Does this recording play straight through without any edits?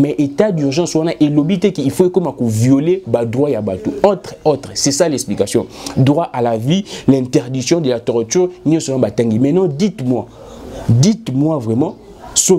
yes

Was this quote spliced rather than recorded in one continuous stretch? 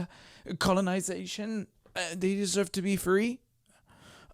no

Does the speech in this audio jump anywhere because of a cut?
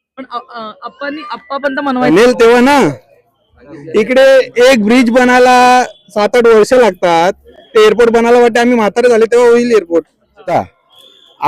yes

